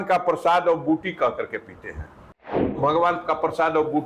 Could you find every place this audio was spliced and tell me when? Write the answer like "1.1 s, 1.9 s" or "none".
2.8 s